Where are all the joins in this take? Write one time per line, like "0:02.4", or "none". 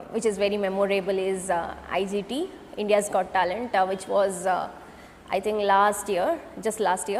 none